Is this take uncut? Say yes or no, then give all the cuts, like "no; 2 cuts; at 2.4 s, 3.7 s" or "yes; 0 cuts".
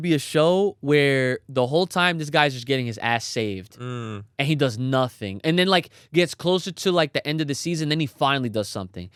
yes; 0 cuts